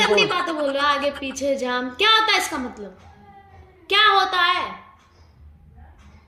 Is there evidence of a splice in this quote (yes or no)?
no